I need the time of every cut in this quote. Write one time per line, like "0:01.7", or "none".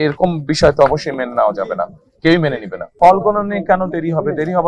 0:02.8